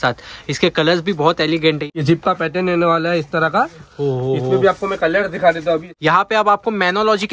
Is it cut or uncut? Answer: cut